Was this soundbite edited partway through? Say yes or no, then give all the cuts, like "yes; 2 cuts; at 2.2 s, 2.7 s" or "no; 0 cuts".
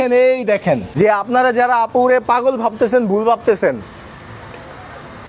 no; 0 cuts